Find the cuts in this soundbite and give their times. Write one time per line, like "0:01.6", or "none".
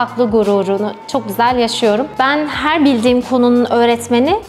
0:02.1